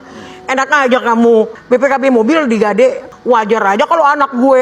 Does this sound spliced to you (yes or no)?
yes